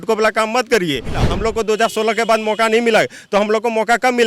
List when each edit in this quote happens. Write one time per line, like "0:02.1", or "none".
0:01.2

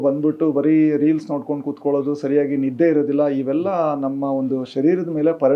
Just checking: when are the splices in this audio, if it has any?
none

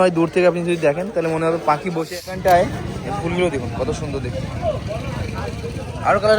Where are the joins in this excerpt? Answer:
0:02.1

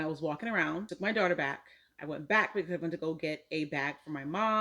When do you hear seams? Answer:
0:00.9

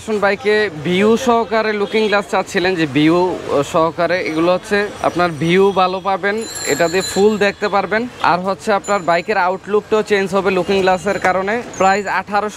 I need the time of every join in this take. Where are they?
none

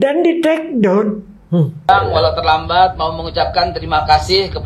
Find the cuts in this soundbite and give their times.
0:01.9

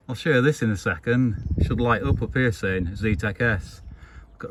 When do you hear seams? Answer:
none

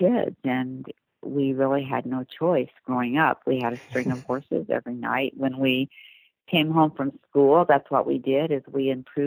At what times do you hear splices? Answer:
none

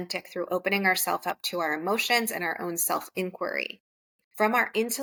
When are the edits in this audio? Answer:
none

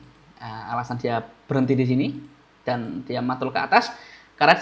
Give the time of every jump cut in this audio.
none

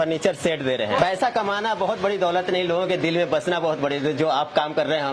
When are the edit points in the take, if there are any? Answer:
0:01.0

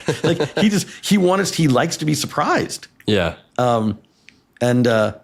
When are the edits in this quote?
none

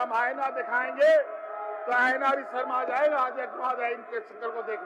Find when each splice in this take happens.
none

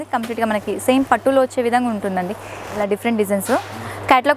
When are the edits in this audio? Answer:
0:02.6

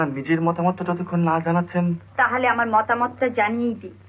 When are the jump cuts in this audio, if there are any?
0:02.0

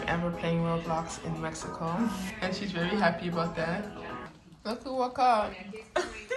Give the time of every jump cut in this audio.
0:02.3
0:04.3

